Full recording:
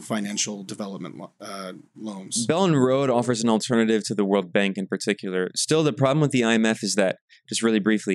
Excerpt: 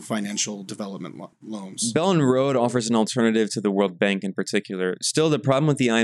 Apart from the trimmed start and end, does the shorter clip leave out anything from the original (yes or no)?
yes